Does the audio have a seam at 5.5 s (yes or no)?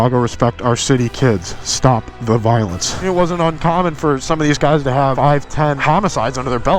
yes